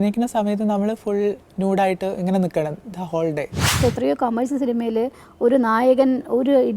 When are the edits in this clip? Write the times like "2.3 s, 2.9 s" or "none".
3.7 s

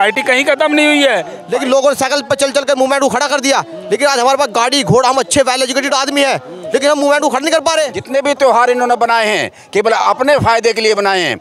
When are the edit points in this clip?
1.3 s, 8.0 s

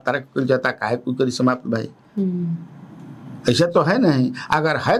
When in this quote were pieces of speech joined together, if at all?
none

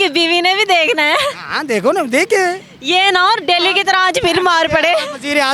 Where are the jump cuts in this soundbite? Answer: none

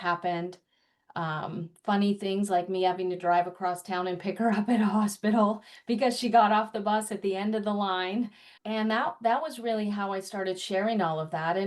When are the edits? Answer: 8.4 s

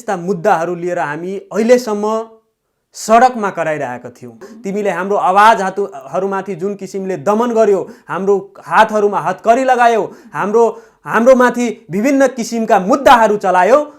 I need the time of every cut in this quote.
4.5 s

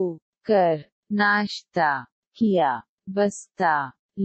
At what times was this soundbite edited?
0.9 s, 2.9 s

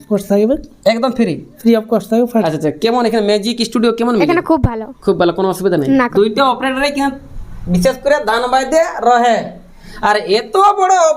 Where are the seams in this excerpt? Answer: 2.3 s, 6.0 s

